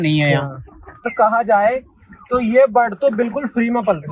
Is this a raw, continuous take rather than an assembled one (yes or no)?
no